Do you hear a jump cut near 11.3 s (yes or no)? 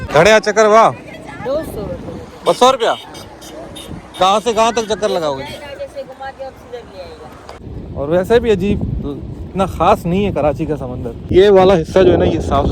yes